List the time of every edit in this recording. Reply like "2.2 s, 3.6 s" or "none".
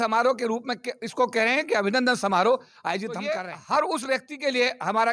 3.4 s